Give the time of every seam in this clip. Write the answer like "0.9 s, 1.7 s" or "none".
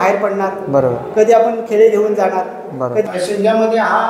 3.1 s